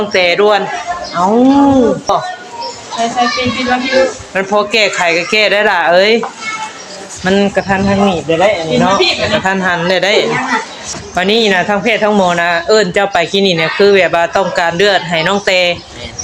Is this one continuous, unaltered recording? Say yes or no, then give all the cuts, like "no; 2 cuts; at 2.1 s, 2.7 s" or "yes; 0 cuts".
no; 2 cuts; at 2.1 s, 10.8 s